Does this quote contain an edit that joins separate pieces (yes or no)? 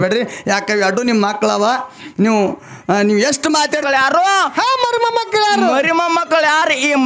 yes